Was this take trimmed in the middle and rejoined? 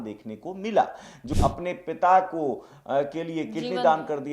yes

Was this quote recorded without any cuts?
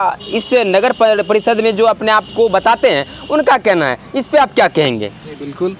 yes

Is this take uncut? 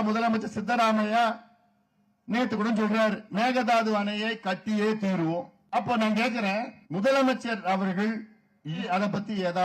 no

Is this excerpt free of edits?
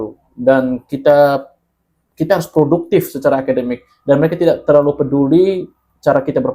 yes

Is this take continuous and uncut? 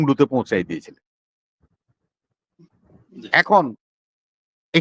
yes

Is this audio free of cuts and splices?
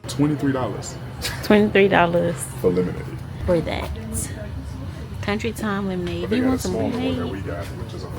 no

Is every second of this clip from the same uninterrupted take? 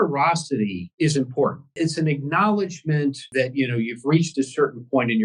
no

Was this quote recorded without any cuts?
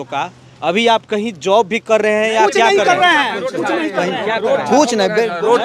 yes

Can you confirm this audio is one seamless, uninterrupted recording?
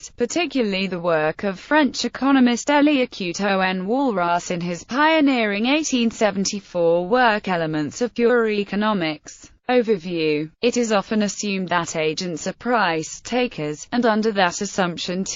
yes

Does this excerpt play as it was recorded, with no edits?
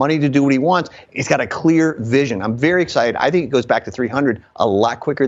yes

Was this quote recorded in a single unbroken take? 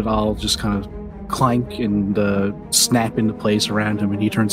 yes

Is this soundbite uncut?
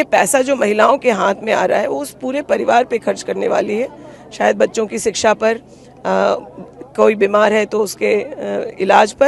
yes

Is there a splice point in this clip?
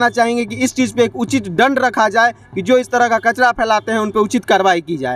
no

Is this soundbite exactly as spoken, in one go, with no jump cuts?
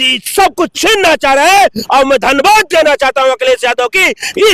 yes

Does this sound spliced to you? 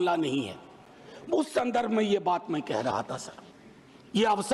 no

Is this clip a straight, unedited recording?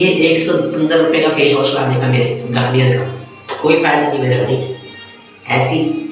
yes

